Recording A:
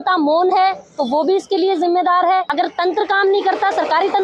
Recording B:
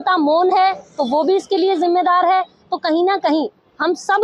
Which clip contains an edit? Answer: A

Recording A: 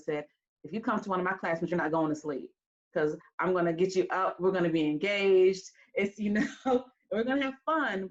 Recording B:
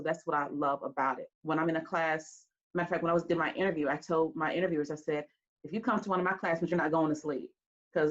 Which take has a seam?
B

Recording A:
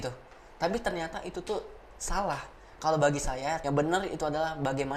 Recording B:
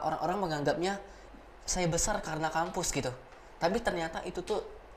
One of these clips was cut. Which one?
A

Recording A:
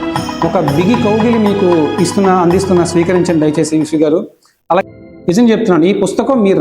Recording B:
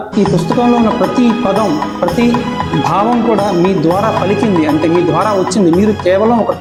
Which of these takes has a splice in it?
A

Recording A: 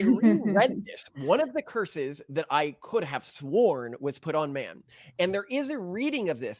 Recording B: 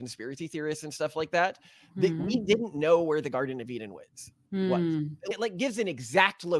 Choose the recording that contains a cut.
B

